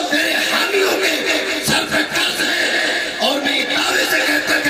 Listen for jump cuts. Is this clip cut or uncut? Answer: uncut